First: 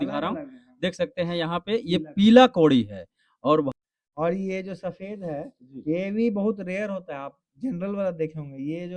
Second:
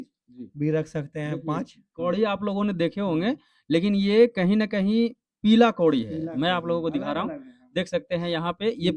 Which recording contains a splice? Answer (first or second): first